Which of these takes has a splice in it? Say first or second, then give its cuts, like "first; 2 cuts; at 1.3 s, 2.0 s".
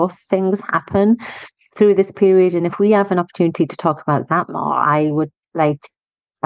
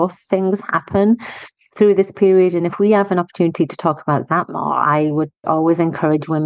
second; 1 cut; at 5.5 s